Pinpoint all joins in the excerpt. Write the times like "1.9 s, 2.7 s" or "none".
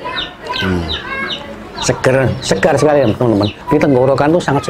3.6 s